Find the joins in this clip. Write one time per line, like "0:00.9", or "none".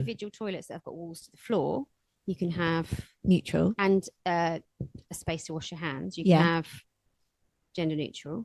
none